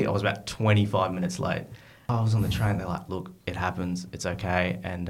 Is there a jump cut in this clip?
yes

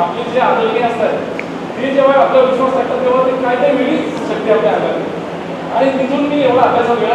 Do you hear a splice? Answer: no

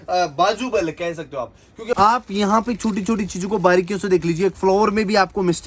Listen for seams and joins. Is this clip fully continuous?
no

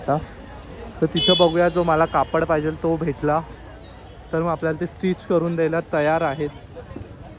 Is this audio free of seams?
yes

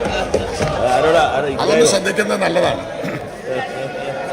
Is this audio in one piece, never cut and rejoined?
yes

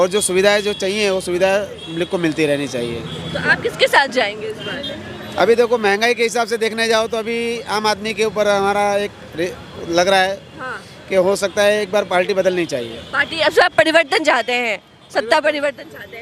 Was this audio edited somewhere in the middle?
no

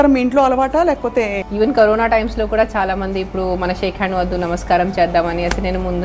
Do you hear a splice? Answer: yes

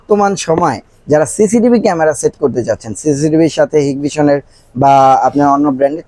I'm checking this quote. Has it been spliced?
no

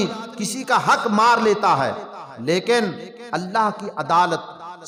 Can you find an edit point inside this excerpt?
no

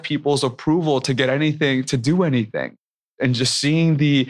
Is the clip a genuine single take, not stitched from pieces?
no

